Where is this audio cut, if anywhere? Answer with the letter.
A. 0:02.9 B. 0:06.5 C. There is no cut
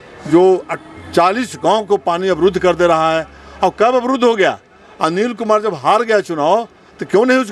C